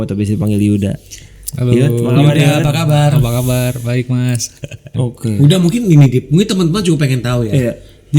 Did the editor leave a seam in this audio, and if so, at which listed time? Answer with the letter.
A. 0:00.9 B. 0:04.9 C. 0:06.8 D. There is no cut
B